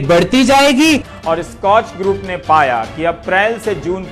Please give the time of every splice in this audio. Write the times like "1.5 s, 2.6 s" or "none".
1.1 s